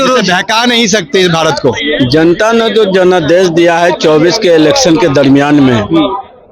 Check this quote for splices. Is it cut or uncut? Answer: cut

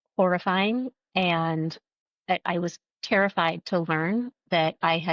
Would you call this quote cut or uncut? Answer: uncut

